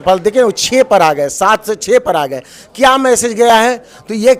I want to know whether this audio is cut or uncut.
uncut